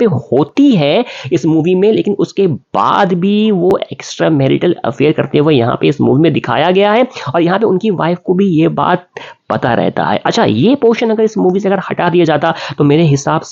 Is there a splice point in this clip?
no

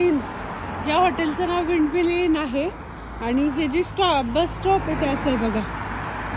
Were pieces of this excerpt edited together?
no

